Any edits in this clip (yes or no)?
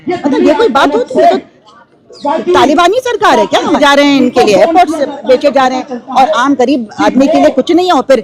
yes